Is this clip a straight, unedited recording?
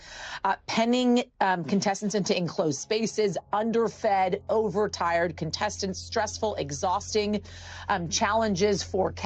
yes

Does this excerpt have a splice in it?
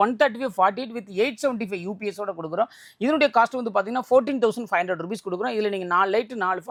no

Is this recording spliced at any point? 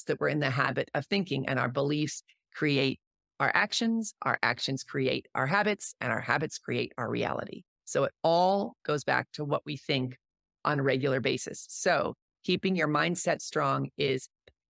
no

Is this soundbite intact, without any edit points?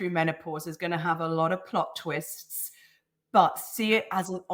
yes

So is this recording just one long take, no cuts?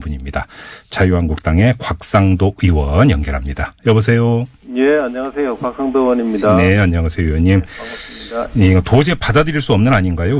yes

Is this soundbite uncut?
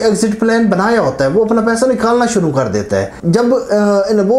no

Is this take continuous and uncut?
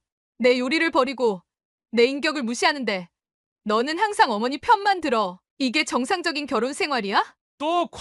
yes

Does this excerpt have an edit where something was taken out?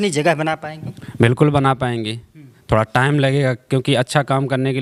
no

